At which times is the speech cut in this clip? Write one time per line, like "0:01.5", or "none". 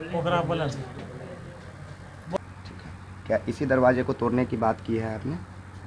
0:02.4